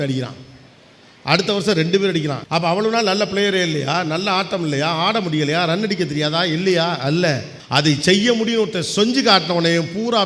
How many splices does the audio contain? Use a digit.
2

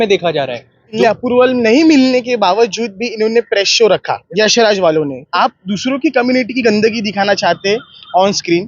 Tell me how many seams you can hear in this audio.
3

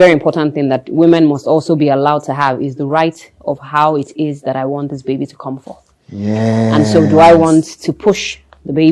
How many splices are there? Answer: 0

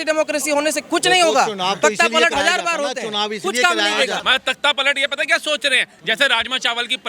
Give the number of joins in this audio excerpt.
1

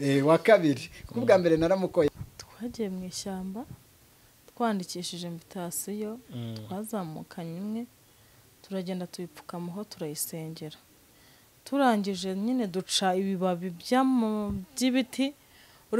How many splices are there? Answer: 1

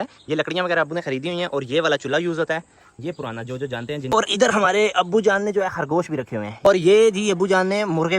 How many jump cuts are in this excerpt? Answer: 2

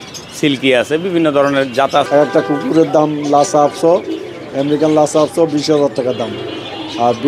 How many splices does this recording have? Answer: 1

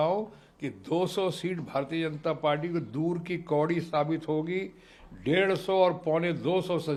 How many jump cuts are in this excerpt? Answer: 0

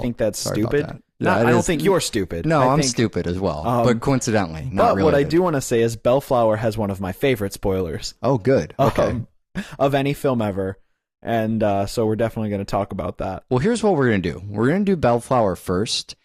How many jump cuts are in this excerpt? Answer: 0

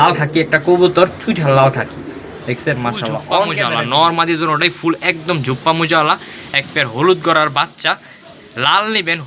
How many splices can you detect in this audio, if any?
1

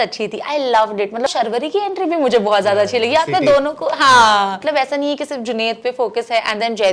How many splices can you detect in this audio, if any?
2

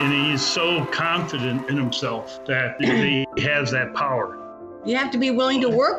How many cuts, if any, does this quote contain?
2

